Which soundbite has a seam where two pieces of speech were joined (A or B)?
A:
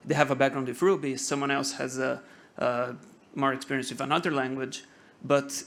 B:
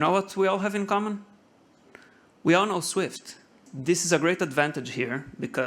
B